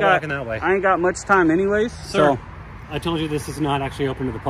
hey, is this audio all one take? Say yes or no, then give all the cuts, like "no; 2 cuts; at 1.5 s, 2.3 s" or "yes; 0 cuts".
yes; 0 cuts